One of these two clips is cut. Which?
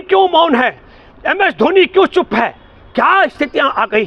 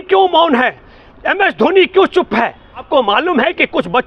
second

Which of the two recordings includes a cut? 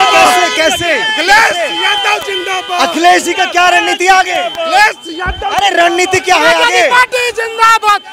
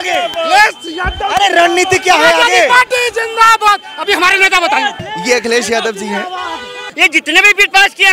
second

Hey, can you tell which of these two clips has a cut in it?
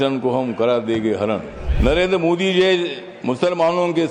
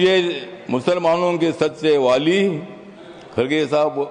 first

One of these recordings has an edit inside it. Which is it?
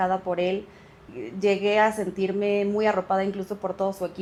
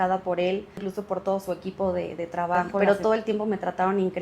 second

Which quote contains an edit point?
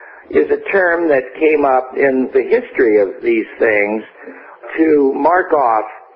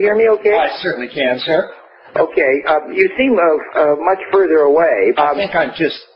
second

